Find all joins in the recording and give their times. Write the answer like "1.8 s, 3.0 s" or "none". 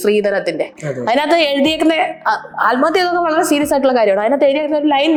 none